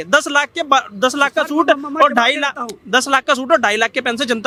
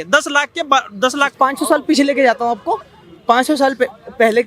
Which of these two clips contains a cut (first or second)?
second